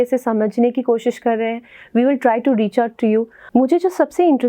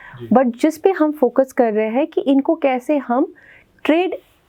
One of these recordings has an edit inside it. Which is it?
first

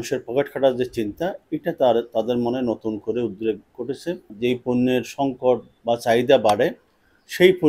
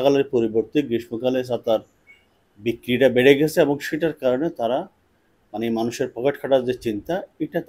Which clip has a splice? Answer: first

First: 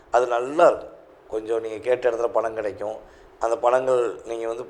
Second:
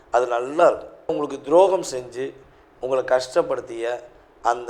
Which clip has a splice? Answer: second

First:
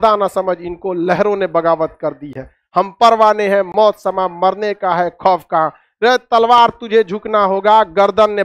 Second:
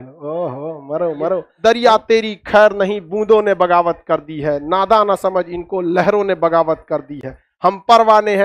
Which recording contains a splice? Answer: second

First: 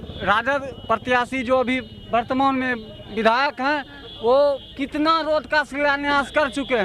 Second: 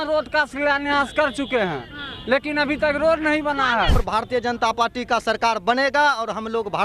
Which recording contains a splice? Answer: second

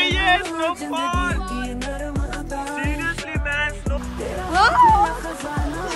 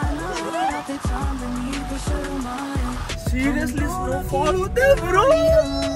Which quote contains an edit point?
second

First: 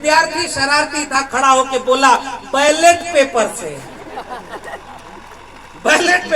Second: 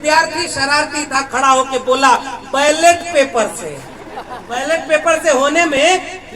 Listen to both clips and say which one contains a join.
second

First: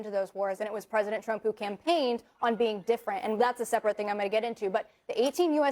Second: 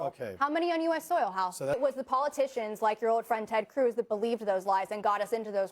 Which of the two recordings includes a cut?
second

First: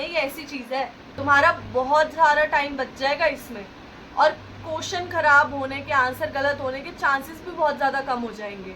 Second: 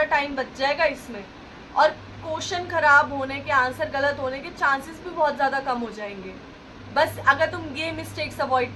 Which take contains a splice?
first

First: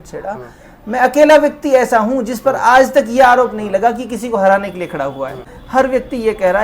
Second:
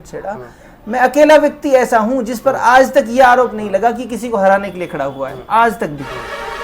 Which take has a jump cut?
first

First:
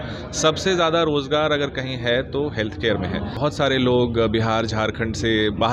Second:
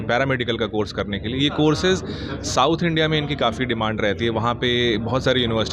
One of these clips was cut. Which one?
first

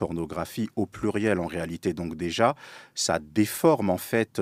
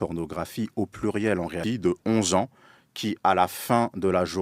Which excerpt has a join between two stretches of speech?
second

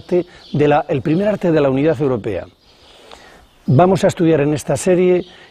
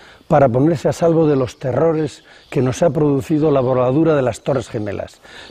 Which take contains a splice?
first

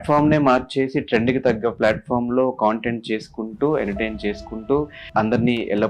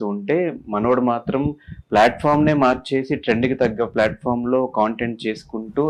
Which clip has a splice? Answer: first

